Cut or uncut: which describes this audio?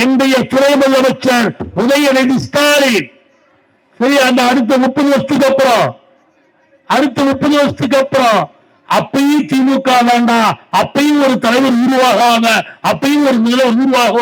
uncut